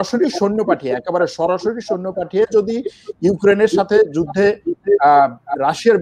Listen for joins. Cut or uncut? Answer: uncut